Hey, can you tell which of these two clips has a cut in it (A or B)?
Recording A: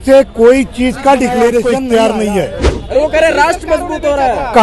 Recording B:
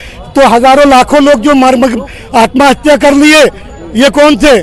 A